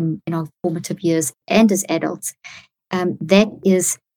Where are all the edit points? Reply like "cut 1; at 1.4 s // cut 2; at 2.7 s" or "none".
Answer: cut 1; at 1.4 s